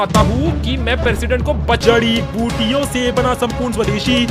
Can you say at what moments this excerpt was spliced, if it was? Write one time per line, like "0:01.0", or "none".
0:01.8